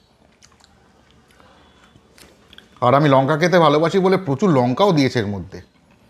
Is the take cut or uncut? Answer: uncut